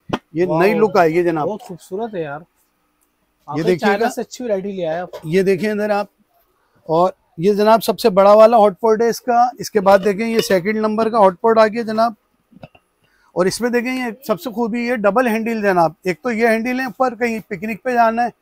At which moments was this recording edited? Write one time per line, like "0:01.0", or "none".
none